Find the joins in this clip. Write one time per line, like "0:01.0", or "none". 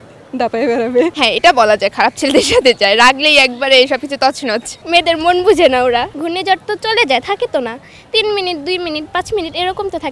0:01.1
0:04.8